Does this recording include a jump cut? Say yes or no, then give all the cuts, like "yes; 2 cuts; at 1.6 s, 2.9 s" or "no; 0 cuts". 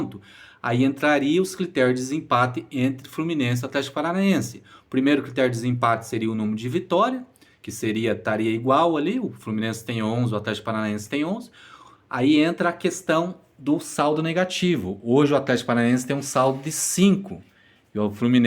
no; 0 cuts